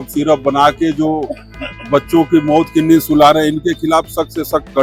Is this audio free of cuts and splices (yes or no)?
yes